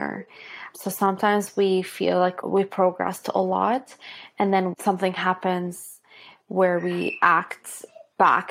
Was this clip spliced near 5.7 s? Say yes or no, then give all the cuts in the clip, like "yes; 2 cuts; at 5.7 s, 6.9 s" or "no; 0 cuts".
no; 1 cut; at 2.4 s